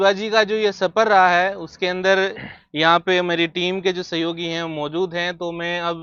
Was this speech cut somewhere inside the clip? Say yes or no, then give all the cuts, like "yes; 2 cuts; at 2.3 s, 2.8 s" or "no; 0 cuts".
no; 0 cuts